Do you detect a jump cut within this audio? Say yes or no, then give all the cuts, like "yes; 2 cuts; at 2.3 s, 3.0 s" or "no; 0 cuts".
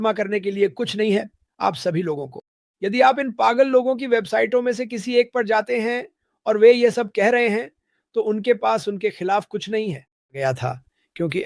yes; 1 cut; at 10.4 s